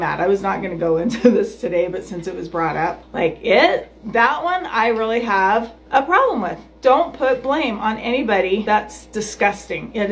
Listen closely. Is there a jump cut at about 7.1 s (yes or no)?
no